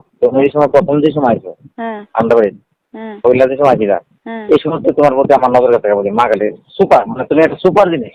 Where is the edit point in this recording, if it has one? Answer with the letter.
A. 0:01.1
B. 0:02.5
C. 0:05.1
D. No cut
D